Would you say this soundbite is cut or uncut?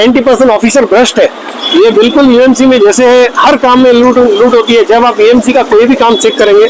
cut